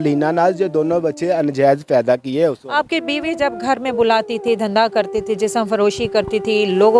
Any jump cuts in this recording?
no; 0 cuts

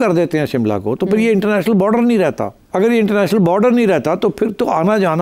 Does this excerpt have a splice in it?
yes; 1 cut; at 2.5 s

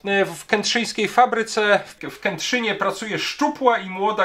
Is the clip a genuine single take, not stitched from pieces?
no; 1 cut; at 2.0 s

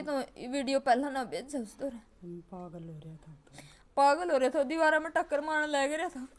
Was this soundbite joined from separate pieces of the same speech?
no; 0 cuts

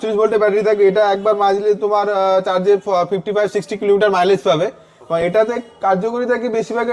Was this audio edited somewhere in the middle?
no; 0 cuts

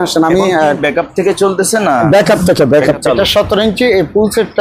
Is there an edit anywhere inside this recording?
yes; 1 cut; at 2.9 s

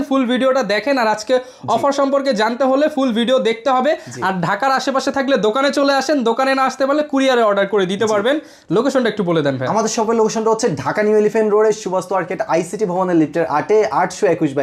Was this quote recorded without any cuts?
yes; 0 cuts

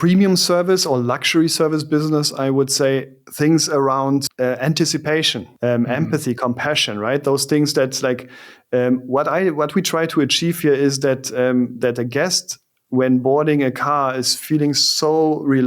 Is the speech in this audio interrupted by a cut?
yes; 3 cuts; at 3.2 s, 4.3 s, 5.4 s

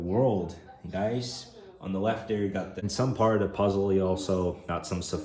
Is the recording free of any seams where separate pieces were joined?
no; 1 cut; at 2.8 s

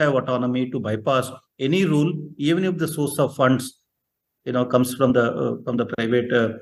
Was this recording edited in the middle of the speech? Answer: no; 0 cuts

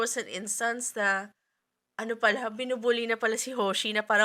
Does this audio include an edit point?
no; 0 cuts

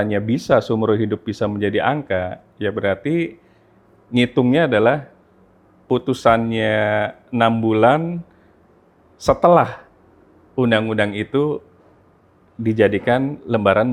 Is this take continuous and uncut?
yes; 0 cuts

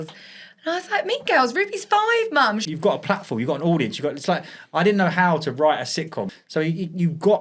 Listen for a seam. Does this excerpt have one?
yes; 2 cuts; at 2.7 s, 6.2 s

